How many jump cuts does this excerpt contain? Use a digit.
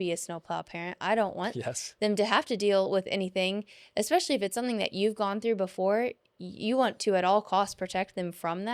0